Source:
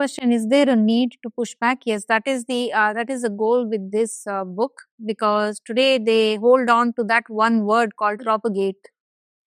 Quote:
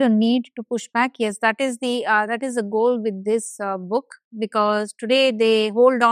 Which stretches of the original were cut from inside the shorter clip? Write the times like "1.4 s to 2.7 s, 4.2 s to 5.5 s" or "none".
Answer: none